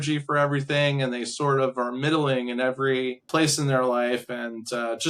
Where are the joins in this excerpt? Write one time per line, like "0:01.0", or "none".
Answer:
0:03.2